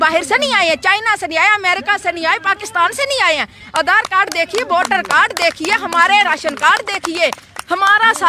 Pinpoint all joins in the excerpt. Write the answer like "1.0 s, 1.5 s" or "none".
none